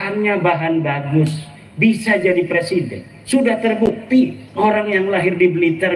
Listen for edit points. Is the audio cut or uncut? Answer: uncut